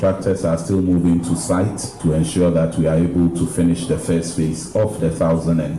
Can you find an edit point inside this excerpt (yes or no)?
yes